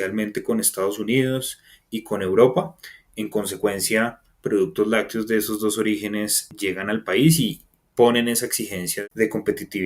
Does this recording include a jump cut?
yes; 2 cuts; at 6.4 s, 8.9 s

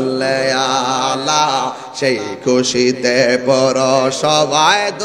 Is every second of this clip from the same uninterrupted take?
yes; 0 cuts

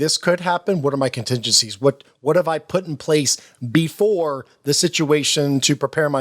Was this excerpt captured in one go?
yes; 0 cuts

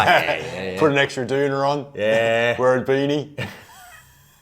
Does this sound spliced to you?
no; 0 cuts

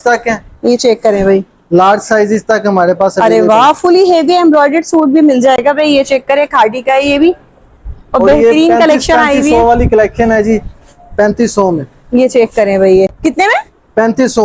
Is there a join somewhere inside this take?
no; 0 cuts

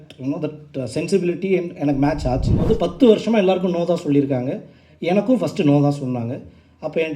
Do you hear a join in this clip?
yes; 1 cut; at 2.6 s

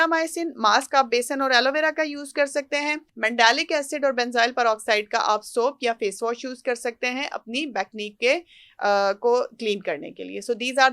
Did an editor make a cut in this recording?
yes; 1 cut; at 3.1 s

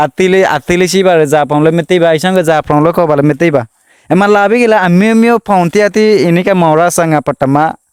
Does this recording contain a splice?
no; 0 cuts

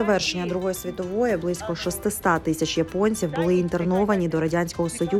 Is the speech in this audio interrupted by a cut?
no; 0 cuts

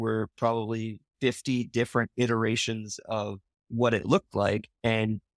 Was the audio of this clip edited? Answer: yes; 1 cut; at 1.0 s

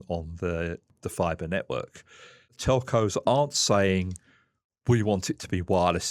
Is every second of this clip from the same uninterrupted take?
no; 1 cut; at 2.6 s

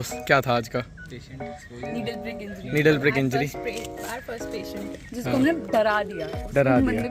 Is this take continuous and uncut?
yes; 0 cuts

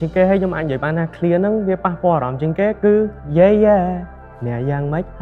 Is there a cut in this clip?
yes; 1 cut; at 3.2 s

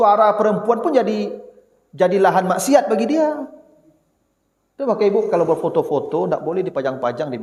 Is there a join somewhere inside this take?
no; 0 cuts

